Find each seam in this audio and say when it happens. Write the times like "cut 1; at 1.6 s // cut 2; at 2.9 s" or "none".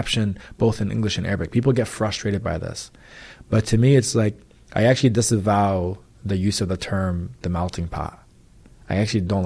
cut 1; at 2.7 s